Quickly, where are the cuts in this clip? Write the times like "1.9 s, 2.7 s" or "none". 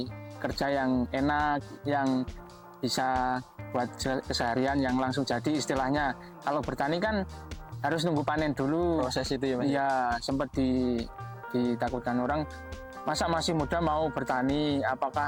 none